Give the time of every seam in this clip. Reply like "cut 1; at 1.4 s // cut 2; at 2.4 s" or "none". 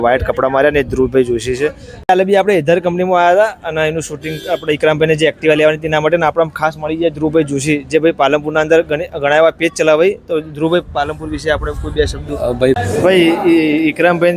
cut 1; at 1.9 s // cut 2; at 12.8 s